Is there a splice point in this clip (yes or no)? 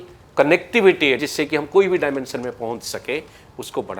yes